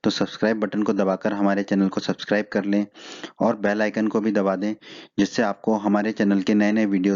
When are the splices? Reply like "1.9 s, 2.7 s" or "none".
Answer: none